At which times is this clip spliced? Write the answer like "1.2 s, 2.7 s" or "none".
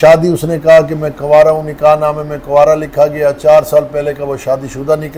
none